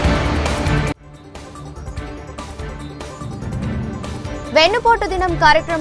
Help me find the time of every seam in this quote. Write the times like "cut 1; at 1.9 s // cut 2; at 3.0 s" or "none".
cut 1; at 1.9 s